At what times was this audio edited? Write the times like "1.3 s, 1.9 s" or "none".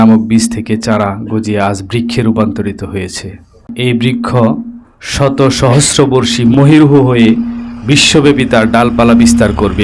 3.7 s, 6.5 s